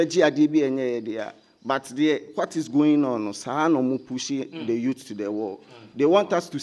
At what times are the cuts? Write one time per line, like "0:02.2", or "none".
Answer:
none